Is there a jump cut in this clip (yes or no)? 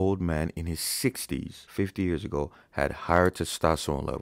yes